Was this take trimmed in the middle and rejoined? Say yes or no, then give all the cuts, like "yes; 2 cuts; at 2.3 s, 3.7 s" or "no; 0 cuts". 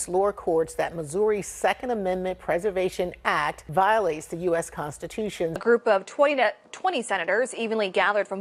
no; 0 cuts